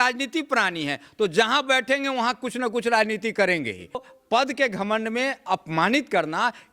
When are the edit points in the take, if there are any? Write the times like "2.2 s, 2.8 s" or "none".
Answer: 4.1 s